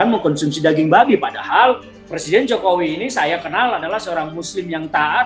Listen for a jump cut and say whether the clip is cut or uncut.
uncut